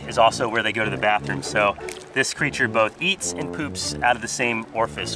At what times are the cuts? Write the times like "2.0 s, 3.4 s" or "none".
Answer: none